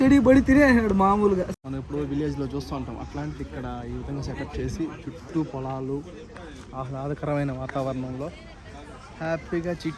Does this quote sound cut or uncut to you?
cut